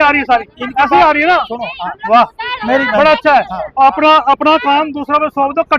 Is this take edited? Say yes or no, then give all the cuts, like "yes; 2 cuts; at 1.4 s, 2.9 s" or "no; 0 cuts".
no; 0 cuts